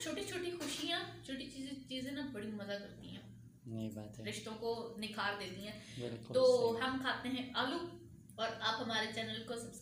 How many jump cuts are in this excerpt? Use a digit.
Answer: 0